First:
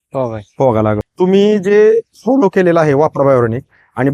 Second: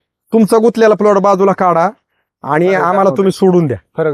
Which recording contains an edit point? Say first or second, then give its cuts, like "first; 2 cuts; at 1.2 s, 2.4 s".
first; 1 cut; at 1.1 s